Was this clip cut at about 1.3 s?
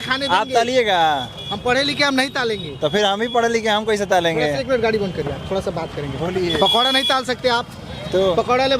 no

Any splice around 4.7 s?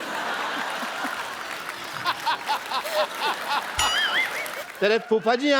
yes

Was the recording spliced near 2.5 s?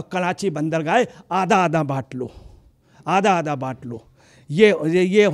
no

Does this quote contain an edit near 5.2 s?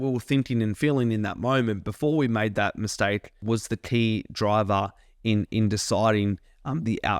no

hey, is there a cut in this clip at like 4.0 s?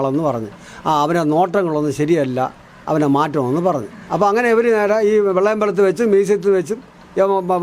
yes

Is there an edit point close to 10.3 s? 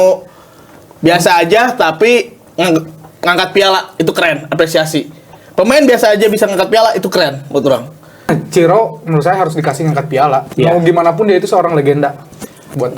no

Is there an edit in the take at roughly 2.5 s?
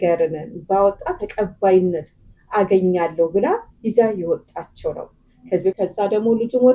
no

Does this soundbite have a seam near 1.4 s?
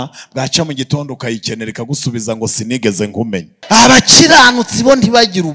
no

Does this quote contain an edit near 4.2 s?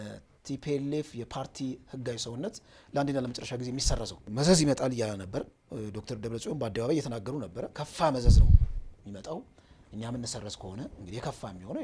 yes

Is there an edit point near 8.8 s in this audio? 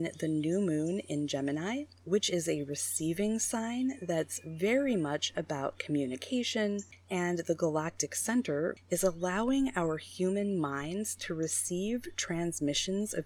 yes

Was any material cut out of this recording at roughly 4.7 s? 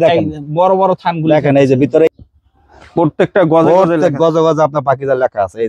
no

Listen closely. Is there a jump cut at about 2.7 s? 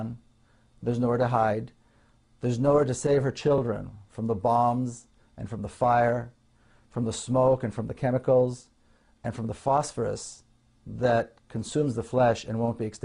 yes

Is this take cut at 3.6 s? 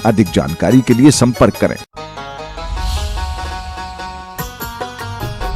no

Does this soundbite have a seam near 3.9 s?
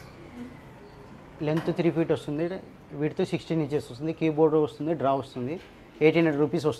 no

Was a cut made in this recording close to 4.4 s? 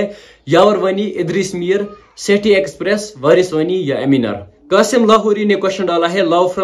yes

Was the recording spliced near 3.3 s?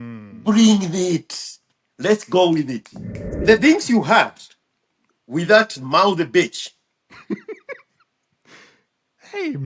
yes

